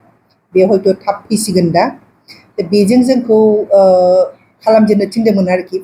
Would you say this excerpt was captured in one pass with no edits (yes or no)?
yes